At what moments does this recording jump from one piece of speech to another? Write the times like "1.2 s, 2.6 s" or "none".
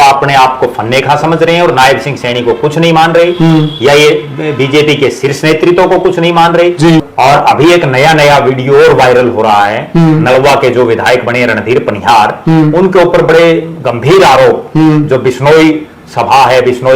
7.1 s